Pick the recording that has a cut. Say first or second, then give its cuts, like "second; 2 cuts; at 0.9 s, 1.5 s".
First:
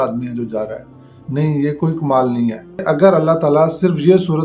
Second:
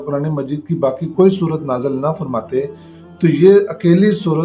first; 1 cut; at 2.8 s